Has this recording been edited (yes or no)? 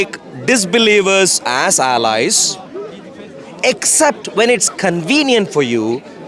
no